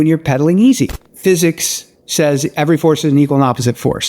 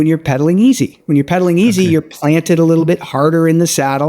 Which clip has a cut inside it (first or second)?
first